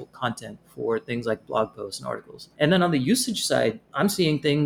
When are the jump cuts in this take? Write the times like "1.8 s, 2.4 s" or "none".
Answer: 2.5 s

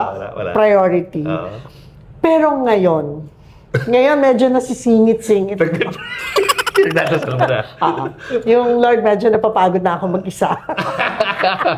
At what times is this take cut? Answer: none

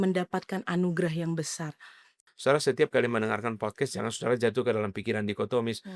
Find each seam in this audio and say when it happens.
2.1 s

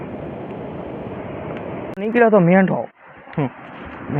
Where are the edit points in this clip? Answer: 2.0 s

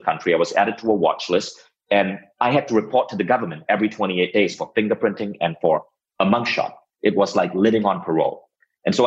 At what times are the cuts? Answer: 6.0 s

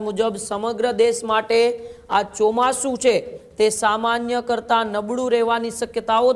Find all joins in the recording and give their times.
none

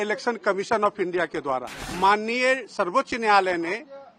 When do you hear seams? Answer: 1.8 s

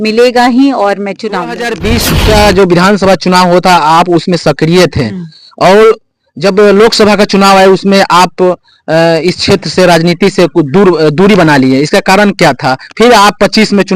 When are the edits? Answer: 1.7 s

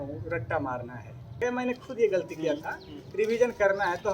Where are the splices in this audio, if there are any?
1.4 s

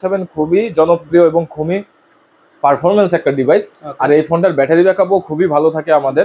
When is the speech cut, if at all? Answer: none

